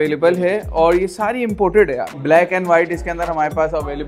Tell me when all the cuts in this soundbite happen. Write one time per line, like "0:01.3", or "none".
0:02.1